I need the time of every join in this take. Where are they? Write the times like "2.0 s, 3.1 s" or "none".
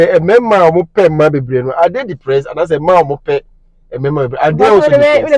none